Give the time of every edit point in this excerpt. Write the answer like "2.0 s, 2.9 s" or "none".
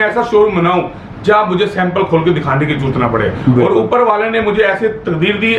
none